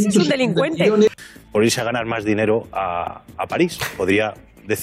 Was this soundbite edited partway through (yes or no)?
yes